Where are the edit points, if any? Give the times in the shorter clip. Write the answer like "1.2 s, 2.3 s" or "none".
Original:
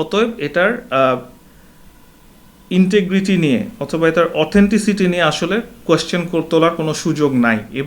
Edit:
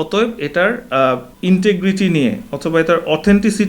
1.3 s